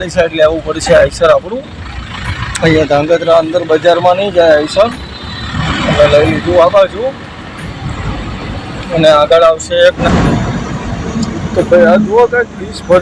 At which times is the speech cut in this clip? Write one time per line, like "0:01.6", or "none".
0:10.0